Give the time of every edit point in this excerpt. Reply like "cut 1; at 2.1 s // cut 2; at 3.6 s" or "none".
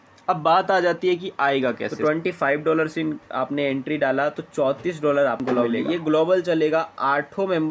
cut 1; at 1.9 s // cut 2; at 5.4 s